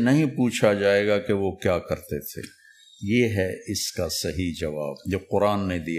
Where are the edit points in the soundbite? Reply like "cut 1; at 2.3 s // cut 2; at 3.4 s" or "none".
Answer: cut 1; at 5.0 s